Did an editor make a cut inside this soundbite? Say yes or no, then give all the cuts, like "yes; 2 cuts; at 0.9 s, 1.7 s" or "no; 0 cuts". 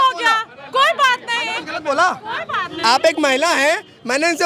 no; 0 cuts